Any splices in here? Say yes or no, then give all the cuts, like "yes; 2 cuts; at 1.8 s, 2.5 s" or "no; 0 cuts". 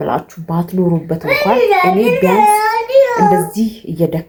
no; 0 cuts